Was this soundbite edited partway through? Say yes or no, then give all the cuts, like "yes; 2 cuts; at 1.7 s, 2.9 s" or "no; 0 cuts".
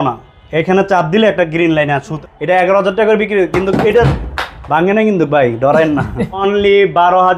yes; 2 cuts; at 2.1 s, 6.4 s